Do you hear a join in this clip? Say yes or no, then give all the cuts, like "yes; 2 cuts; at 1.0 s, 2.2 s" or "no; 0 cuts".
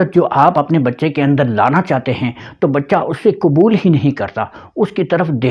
no; 0 cuts